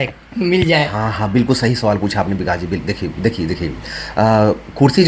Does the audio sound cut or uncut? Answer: uncut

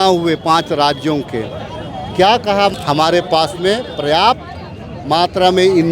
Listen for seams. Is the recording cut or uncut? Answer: cut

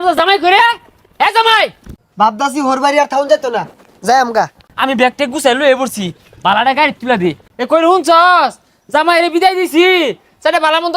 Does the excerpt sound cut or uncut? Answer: cut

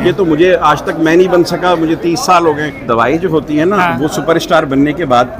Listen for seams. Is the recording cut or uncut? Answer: cut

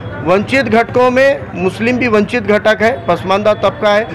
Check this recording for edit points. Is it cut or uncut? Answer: uncut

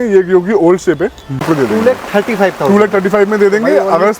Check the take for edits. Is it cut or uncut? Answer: cut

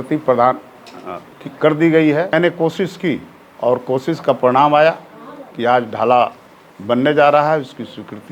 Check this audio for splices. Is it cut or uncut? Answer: cut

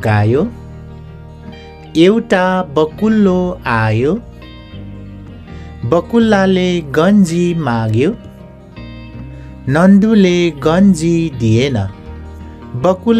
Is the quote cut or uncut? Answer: uncut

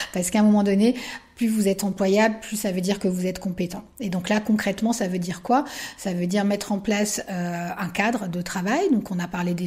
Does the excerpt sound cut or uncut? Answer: uncut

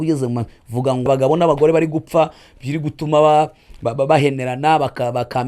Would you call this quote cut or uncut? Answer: cut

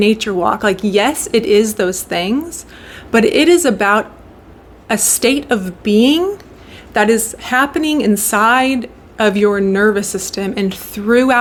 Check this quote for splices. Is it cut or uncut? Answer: uncut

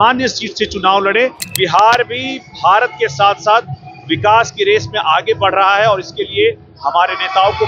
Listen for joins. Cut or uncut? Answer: cut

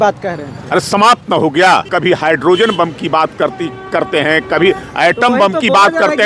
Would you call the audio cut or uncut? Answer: cut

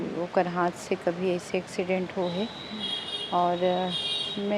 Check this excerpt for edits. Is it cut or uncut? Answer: uncut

